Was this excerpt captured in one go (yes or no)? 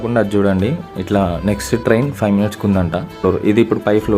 no